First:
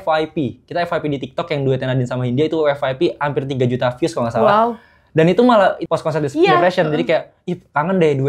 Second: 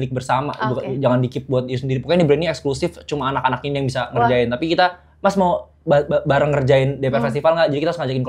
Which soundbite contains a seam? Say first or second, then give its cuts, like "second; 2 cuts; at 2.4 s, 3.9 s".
first; 1 cut; at 5.8 s